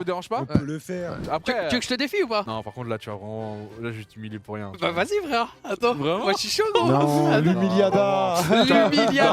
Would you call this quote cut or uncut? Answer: cut